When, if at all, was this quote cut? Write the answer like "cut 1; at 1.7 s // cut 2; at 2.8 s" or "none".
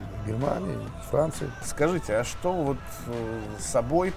cut 1; at 1.7 s